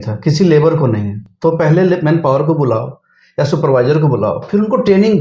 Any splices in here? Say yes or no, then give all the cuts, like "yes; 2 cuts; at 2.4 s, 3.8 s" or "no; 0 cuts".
no; 0 cuts